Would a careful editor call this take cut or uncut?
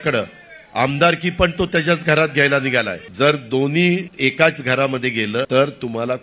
cut